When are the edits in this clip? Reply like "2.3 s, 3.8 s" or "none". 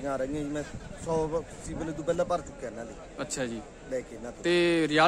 none